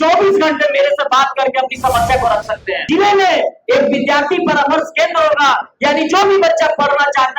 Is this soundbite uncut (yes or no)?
no